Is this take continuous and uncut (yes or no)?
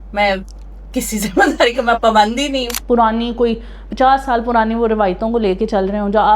no